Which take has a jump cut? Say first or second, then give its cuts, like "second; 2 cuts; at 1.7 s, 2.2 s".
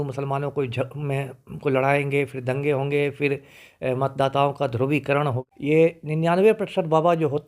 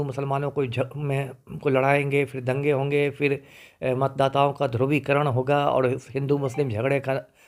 first; 1 cut; at 5.4 s